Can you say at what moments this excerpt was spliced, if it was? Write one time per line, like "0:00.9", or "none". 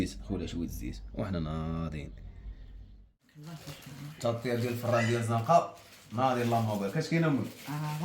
0:03.3

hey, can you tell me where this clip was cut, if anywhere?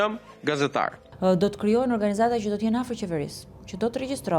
0:01.0

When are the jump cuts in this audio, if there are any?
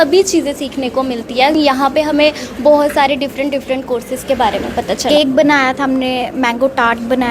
0:01.5
0:05.1

